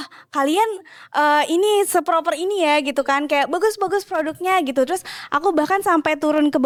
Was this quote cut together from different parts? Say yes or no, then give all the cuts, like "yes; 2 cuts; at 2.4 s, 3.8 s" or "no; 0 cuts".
no; 0 cuts